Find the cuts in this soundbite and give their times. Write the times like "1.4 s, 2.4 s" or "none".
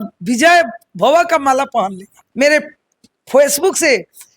2.2 s